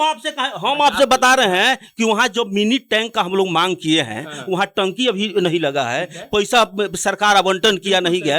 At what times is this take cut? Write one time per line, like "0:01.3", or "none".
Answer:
none